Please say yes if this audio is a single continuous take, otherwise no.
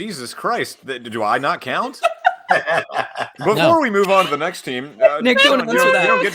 yes